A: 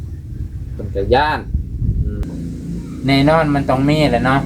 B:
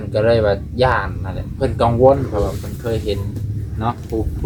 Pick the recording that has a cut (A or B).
A